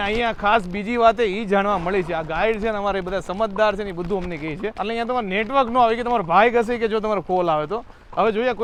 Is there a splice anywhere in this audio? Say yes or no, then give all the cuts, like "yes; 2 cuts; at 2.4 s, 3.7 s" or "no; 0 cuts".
no; 0 cuts